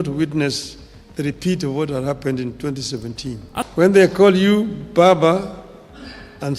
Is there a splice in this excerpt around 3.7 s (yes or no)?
yes